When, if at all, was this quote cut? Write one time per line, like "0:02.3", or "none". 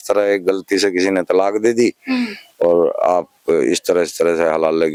none

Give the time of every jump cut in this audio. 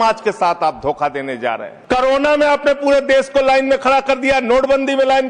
0:01.7

